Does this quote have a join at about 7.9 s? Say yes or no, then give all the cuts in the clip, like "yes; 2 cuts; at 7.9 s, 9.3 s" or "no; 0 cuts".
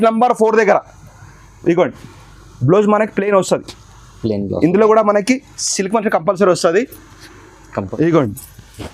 yes; 1 cut; at 7.9 s